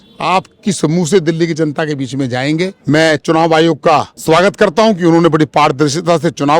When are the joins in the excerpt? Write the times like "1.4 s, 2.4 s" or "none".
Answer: 2.7 s, 4.1 s